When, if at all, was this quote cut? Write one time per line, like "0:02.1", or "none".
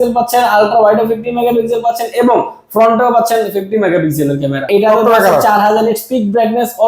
0:04.7